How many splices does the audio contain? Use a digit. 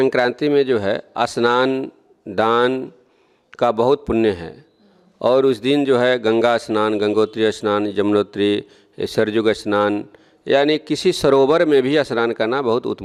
0